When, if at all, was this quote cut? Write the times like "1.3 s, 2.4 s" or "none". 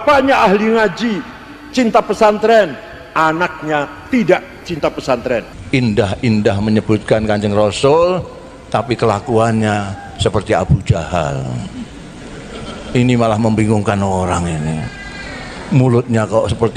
5.6 s